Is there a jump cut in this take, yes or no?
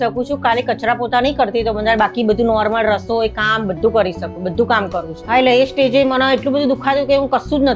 yes